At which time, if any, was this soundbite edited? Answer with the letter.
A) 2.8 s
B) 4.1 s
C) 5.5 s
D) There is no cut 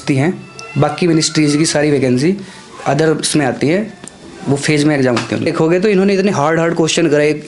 C